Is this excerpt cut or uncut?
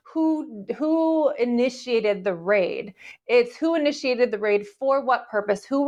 uncut